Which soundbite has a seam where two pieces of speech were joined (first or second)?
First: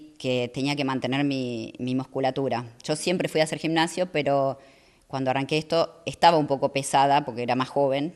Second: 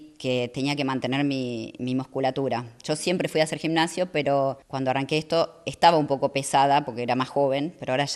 second